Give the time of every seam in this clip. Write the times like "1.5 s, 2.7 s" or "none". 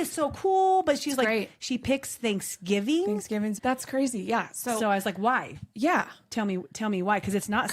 3.6 s